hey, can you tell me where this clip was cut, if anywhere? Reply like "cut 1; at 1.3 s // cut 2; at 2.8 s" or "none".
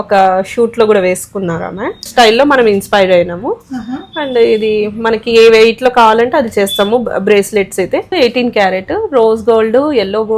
cut 1; at 2.1 s // cut 2; at 8.1 s